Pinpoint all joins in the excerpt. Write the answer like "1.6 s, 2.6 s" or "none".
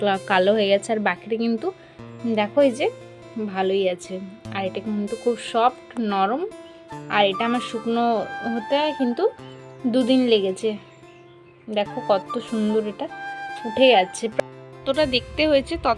14.3 s